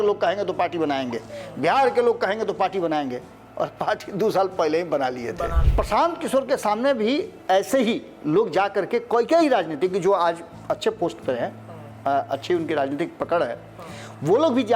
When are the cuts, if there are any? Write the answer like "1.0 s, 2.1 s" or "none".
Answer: 5.6 s

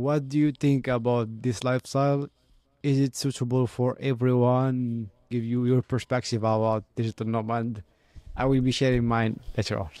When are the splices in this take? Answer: none

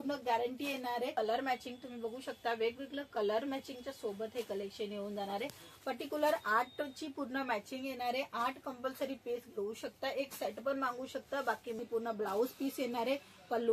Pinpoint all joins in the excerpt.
1.1 s, 11.8 s

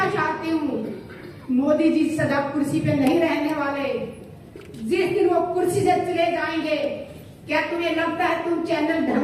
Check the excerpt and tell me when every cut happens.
none

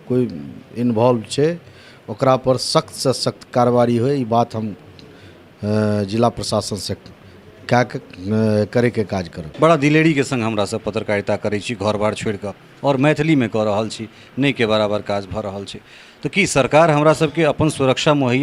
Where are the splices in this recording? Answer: 9.4 s

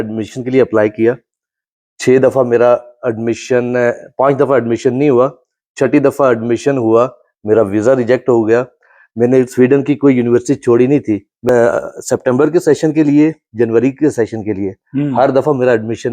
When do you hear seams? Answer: 11.5 s

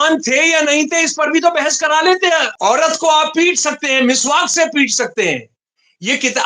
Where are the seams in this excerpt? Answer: 2.5 s

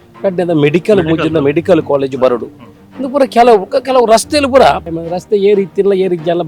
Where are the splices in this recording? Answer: 5.0 s

